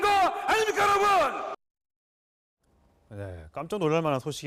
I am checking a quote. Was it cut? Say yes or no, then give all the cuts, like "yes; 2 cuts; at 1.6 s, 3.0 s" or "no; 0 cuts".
no; 0 cuts